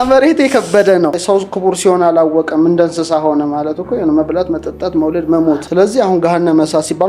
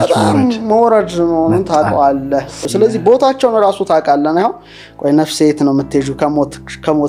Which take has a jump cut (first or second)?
first